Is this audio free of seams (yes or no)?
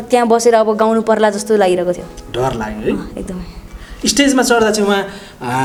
yes